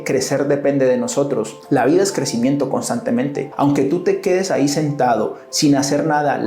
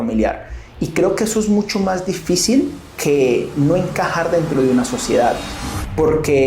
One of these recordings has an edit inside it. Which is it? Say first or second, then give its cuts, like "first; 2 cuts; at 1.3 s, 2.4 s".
first; 2 cuts; at 1.5 s, 3.4 s